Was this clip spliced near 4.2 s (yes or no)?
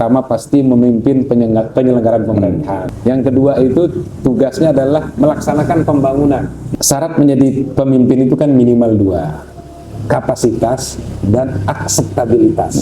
no